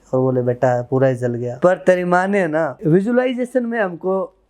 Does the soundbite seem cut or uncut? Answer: cut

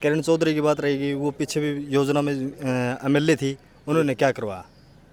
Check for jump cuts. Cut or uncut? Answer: uncut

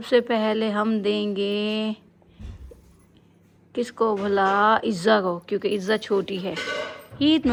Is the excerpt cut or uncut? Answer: uncut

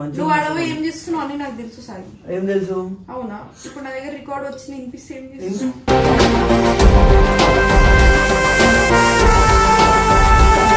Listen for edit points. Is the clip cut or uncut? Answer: uncut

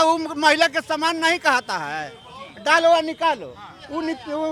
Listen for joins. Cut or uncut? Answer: uncut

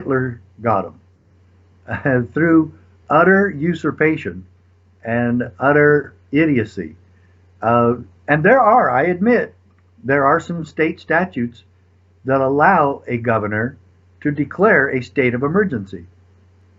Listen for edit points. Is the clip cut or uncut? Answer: uncut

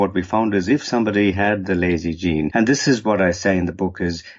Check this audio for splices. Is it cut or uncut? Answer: cut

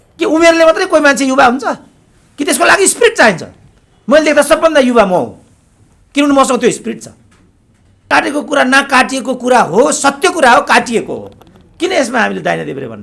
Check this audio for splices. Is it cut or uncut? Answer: cut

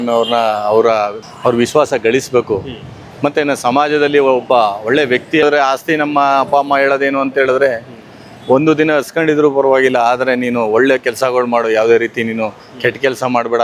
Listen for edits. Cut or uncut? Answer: cut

